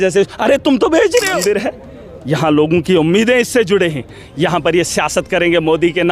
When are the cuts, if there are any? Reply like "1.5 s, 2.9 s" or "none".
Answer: 1.4 s